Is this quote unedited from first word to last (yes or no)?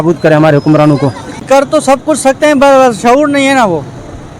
no